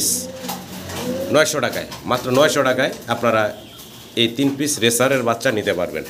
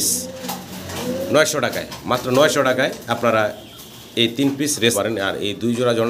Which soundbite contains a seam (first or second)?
second